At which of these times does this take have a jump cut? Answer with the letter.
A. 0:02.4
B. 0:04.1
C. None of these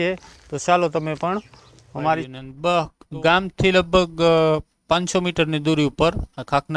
A